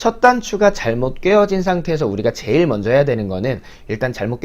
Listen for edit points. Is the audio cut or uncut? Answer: uncut